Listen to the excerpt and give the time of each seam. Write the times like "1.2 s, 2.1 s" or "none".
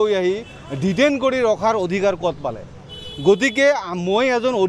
none